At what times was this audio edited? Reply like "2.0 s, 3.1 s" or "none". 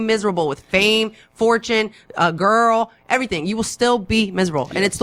none